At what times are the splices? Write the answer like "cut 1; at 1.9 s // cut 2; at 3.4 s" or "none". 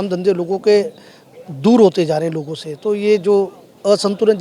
none

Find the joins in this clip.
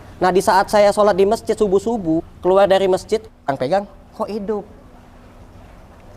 cut 1; at 2.3 s // cut 2; at 3.4 s

